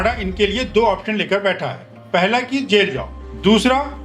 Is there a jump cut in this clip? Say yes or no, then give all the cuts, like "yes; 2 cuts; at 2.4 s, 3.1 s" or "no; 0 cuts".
no; 0 cuts